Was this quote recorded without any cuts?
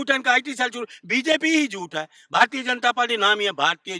yes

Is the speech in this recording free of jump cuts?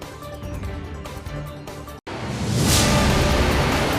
no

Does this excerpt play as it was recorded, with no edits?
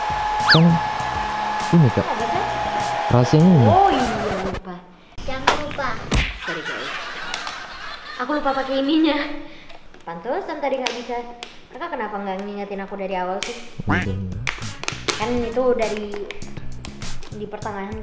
yes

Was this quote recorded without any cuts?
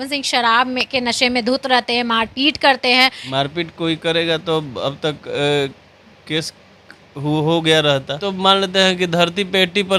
no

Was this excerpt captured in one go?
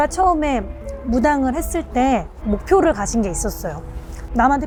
yes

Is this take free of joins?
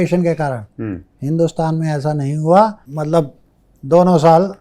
no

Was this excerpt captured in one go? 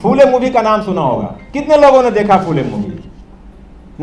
yes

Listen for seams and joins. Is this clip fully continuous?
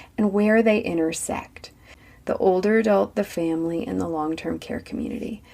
no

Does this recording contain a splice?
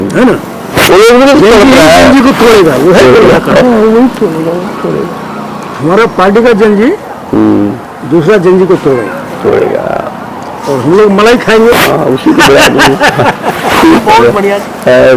no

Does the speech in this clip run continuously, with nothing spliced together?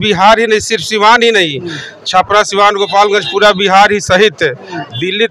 yes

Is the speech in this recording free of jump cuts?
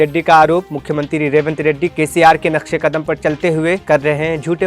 yes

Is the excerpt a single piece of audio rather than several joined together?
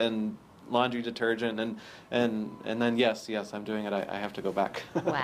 yes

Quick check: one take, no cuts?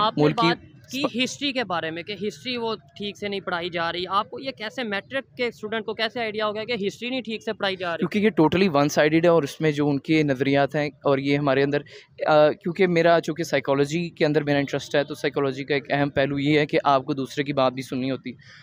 yes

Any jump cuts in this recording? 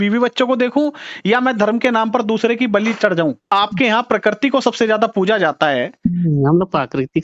yes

